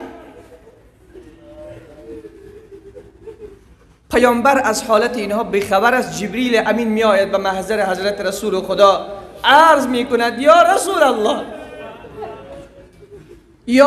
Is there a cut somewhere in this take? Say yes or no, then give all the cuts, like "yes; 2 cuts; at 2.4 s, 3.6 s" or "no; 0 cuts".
no; 0 cuts